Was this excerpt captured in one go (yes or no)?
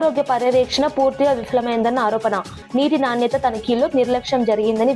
yes